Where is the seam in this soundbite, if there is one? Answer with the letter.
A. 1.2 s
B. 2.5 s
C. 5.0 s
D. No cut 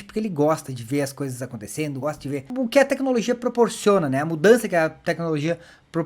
B